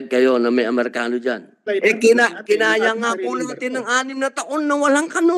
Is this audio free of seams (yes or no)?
no